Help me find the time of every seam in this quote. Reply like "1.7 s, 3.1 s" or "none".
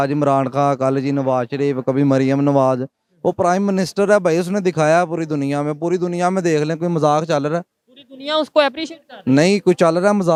none